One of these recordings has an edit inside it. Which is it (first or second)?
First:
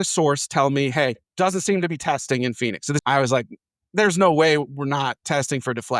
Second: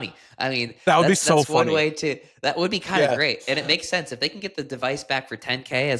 first